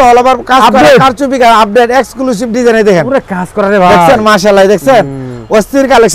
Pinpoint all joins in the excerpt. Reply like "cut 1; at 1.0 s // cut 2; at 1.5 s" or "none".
none